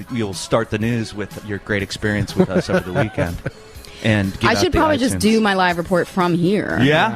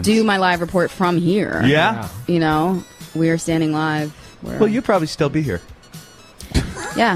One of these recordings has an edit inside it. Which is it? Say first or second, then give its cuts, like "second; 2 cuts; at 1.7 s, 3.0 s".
first; 1 cut; at 1.4 s